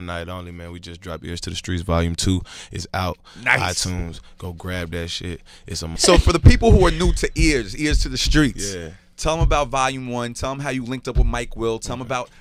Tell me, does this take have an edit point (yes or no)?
no